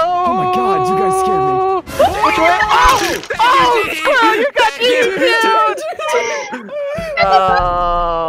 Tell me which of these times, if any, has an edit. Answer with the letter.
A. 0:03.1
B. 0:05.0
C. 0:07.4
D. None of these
C